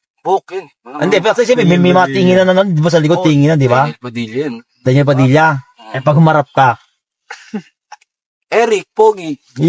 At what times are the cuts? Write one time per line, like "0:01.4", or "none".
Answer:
none